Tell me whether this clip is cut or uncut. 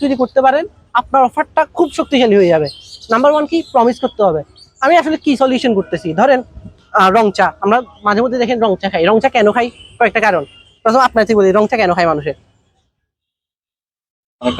uncut